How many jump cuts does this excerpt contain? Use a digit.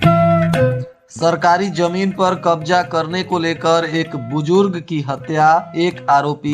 1